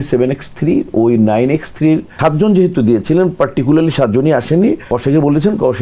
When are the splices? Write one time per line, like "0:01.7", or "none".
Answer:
0:02.1
0:04.9